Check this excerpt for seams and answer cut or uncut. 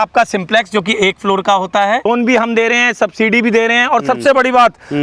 cut